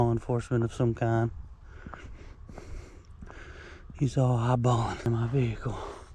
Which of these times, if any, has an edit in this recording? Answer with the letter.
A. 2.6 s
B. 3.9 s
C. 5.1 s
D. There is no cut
C